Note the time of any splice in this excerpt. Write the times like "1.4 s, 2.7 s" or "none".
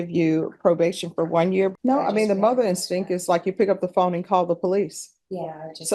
1.7 s